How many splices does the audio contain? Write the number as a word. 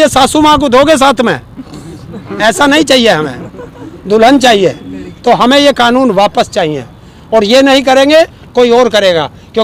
zero